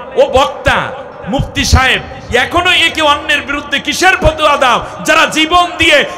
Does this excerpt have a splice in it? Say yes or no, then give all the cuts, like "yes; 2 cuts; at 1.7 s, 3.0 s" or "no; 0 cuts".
yes; 1 cut; at 1.1 s